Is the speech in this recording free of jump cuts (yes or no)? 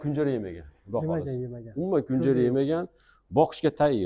yes